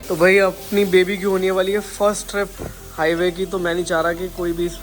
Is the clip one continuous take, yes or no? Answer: yes